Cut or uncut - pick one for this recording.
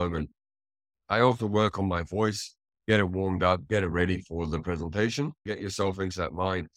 cut